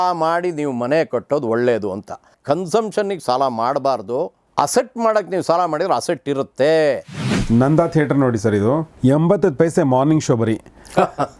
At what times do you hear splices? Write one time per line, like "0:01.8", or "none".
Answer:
0:02.3
0:07.4